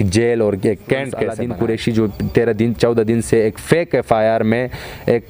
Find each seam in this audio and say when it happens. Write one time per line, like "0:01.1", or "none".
0:01.4